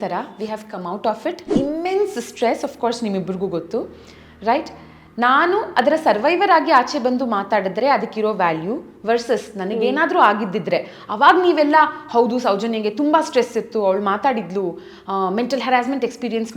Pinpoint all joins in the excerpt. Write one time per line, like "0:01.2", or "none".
0:01.5